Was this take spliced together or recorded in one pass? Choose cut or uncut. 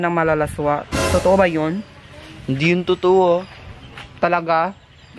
uncut